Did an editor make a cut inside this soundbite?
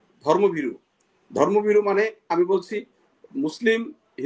no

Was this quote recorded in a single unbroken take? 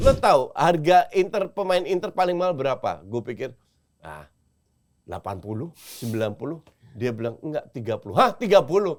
yes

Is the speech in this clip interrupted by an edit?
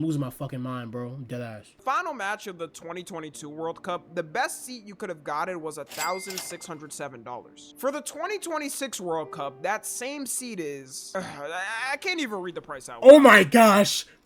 yes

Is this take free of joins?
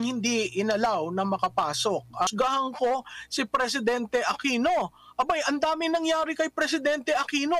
no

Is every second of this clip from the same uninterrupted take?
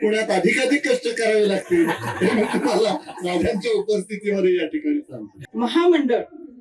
no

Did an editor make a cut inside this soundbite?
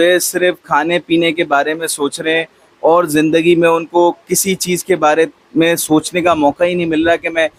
no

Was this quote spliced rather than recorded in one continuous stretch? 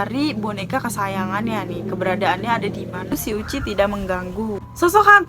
yes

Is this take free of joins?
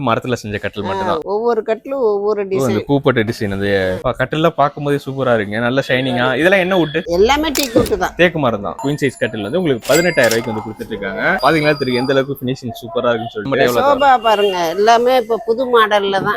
no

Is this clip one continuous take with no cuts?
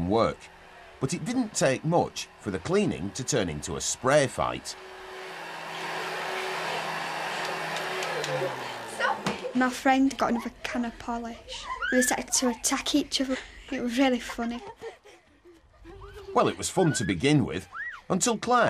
no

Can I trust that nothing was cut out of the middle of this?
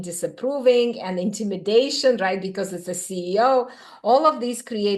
yes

